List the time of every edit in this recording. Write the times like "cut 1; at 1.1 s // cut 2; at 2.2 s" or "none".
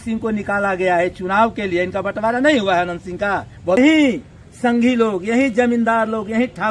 cut 1; at 3.8 s